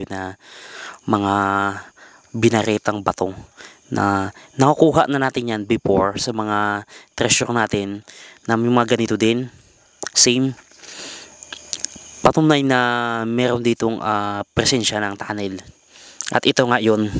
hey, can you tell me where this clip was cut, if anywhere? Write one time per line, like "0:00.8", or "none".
none